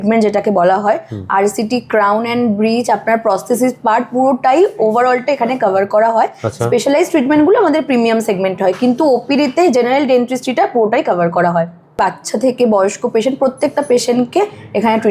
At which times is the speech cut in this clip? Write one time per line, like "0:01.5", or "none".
none

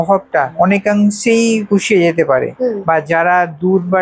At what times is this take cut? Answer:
0:02.5

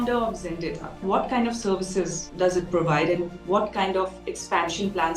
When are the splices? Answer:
0:01.0

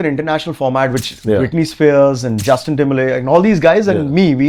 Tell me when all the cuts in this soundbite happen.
none

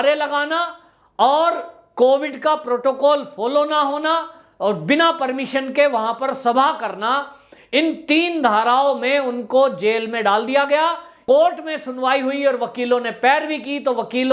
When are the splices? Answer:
0:11.2

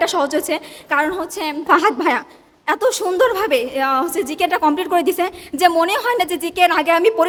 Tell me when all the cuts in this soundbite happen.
none

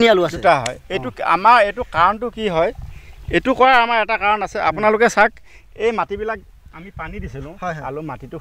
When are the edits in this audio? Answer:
none

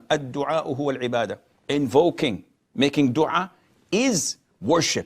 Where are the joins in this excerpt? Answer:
0:01.5

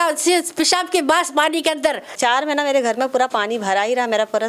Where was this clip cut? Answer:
0:02.2

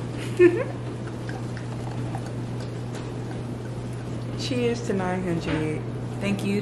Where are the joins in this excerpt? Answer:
none

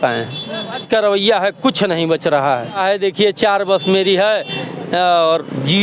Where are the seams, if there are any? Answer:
0:00.8
0:02.8

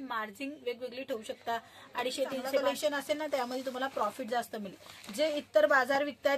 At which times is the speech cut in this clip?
0:02.6

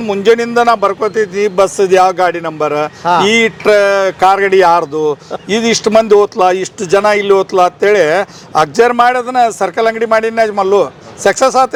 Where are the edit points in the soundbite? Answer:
none

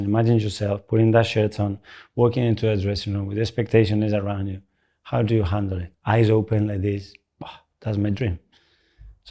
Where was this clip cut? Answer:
0:05.9

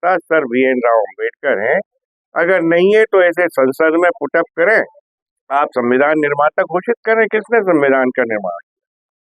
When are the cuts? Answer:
0:05.0

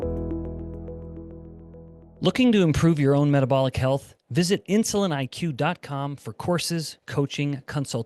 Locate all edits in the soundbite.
0:02.0

